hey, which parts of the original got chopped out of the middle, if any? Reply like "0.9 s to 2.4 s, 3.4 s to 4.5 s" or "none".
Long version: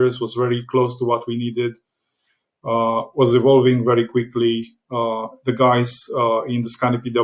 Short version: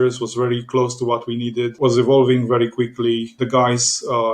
1.7 s to 3.1 s, 4.7 s to 5.4 s